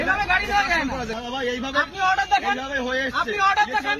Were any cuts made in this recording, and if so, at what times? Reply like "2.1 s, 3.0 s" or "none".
1.1 s